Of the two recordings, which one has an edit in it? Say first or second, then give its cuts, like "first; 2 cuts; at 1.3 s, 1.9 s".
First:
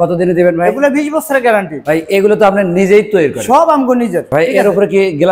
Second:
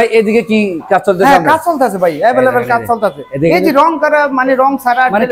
first; 2 cuts; at 1.8 s, 4.3 s